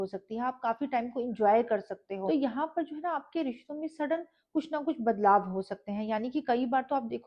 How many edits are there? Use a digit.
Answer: 1